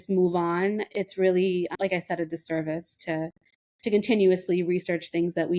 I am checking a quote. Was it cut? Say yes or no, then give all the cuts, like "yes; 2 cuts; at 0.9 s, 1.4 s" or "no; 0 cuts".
yes; 2 cuts; at 0.8 s, 1.7 s